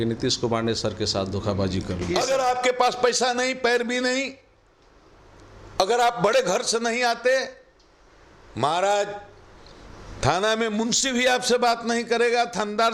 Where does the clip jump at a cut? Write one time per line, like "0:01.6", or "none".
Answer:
0:02.1